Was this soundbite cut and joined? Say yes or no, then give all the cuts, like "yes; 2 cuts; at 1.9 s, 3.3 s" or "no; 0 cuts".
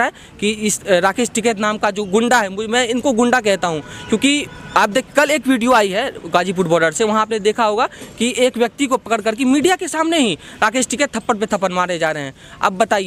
no; 0 cuts